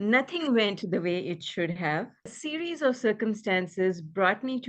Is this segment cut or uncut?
cut